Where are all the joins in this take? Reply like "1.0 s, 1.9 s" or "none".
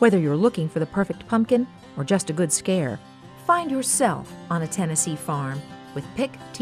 none